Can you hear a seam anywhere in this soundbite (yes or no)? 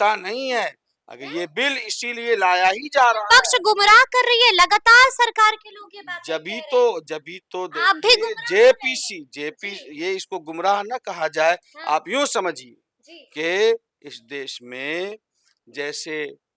no